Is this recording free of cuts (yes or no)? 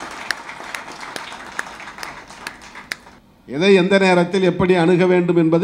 no